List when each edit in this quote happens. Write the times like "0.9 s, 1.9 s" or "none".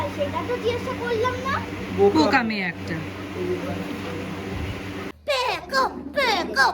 5.1 s